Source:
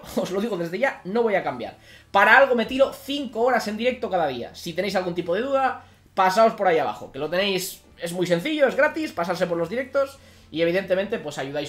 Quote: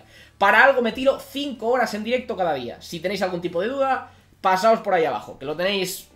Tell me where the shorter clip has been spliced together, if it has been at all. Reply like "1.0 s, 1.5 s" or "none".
none